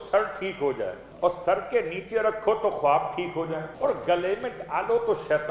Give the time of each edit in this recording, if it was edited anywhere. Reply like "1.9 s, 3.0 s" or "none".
1.0 s, 3.7 s